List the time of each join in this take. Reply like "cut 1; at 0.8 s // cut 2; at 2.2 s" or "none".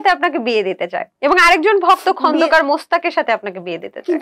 none